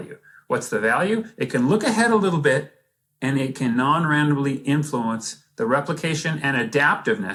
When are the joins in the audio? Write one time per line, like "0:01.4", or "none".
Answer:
none